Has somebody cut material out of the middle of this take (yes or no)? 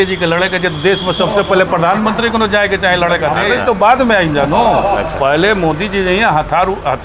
yes